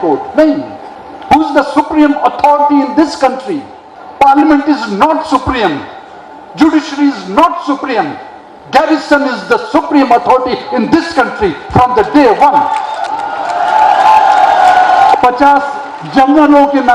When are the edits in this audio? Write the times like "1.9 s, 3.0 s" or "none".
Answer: 13.1 s, 15.1 s